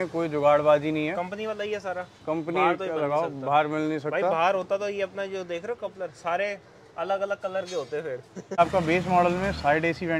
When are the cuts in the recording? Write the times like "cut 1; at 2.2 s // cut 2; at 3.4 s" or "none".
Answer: cut 1; at 8.6 s